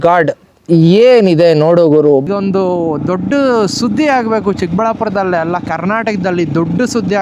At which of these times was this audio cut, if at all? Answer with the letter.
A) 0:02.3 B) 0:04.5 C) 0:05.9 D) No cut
A